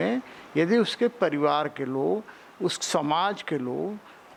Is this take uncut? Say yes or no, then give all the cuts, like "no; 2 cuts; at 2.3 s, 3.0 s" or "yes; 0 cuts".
yes; 0 cuts